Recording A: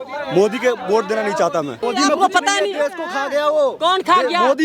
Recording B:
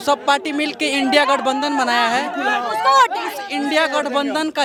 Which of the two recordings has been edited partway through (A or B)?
A